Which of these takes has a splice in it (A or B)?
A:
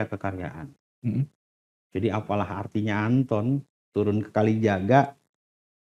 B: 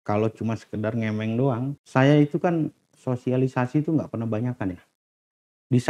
B